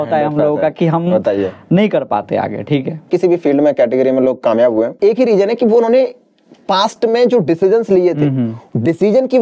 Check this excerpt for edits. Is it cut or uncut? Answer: cut